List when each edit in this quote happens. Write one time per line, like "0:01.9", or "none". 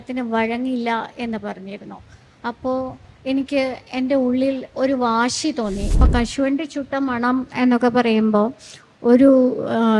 0:05.9